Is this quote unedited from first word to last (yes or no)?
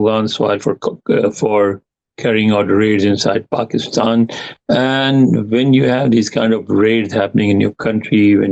yes